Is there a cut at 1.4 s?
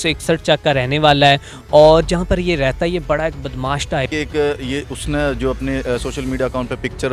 no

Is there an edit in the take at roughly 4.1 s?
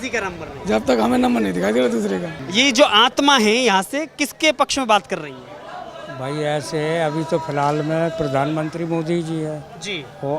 no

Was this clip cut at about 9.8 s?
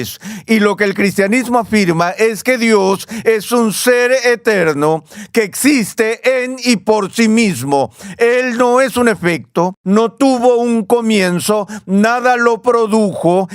yes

